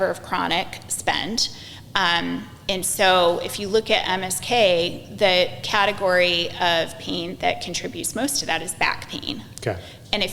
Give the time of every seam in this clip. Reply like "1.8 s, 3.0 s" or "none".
none